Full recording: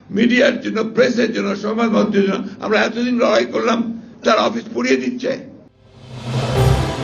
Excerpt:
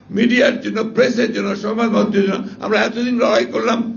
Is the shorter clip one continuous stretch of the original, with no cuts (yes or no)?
yes